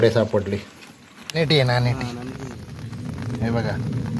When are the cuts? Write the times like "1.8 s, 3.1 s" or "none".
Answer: 1.3 s